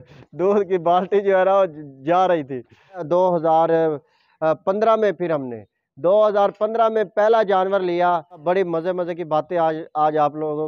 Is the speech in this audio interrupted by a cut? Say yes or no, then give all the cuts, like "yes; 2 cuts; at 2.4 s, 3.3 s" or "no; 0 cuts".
yes; 2 cuts; at 3.0 s, 8.4 s